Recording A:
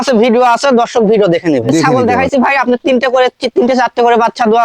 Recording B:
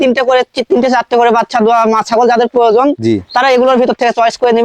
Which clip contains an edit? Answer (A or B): A